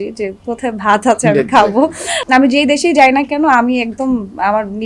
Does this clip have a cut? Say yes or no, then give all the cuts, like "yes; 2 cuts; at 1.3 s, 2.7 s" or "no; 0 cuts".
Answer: yes; 1 cut; at 2.2 s